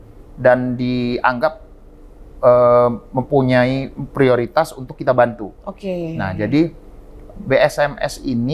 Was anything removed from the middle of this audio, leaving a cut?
no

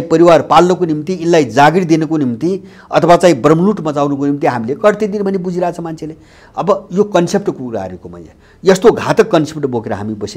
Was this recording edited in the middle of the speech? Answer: no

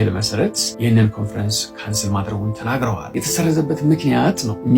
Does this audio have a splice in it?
yes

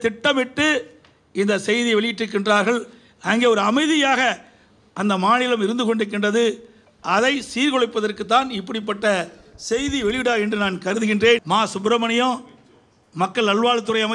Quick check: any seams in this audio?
yes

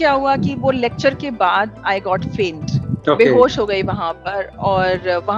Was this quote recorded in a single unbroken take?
yes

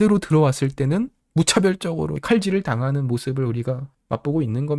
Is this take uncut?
no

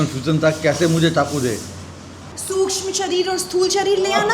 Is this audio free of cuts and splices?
no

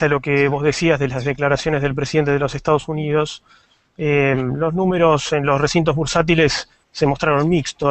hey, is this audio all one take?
yes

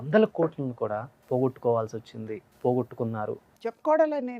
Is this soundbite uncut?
no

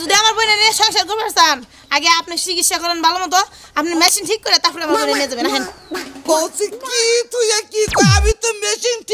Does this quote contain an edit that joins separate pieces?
no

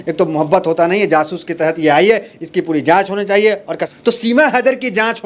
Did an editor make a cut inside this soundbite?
yes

